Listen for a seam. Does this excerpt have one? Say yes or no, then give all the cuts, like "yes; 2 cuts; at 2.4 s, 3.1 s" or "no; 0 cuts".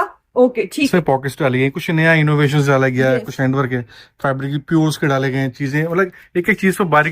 yes; 1 cut; at 0.9 s